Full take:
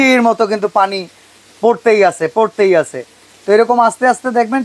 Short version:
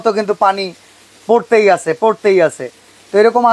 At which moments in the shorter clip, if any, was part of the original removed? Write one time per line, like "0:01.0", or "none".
none